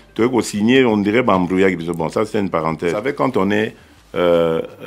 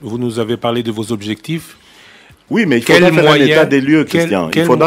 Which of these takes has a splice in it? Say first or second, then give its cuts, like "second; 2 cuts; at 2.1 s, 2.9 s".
first; 1 cut; at 3.0 s